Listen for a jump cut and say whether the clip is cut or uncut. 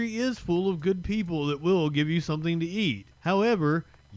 cut